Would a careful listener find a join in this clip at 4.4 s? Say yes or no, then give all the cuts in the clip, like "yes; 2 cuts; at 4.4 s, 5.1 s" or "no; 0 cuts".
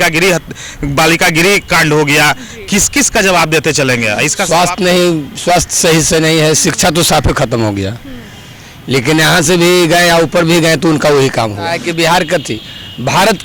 yes; 2 cuts; at 4.4 s, 11.8 s